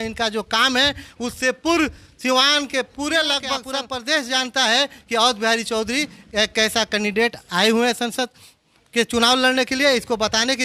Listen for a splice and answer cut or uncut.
cut